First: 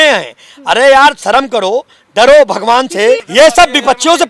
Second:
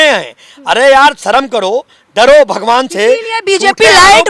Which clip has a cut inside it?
first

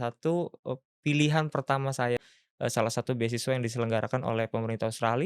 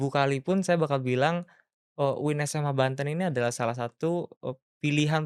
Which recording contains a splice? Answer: first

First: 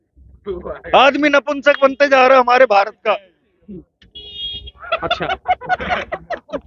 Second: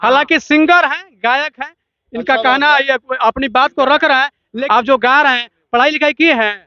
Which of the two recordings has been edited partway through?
second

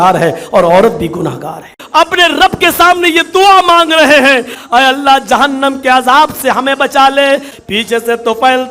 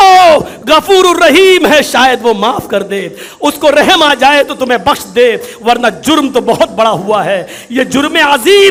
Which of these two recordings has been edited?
first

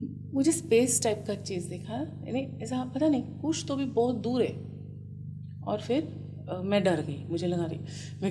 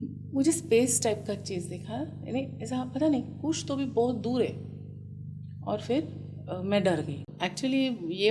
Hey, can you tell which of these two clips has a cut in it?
second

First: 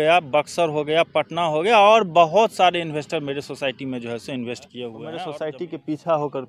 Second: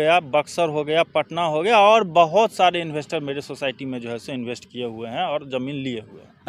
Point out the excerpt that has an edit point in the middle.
first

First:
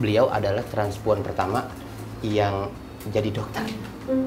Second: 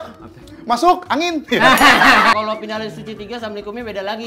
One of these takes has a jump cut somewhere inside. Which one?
second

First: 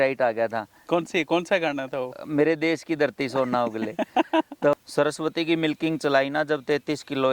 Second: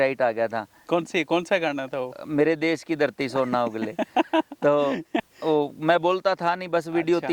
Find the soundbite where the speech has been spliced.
first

